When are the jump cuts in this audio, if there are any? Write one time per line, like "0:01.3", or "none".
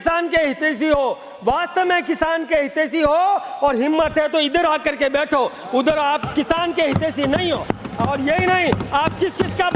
none